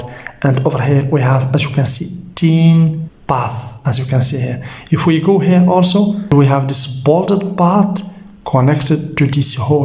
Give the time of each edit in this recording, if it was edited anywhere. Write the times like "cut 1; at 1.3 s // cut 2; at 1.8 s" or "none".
cut 1; at 3.1 s // cut 2; at 6.3 s